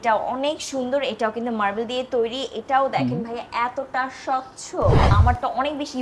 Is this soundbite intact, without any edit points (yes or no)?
no